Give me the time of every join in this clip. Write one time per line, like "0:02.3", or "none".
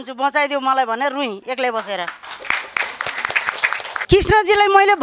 0:03.9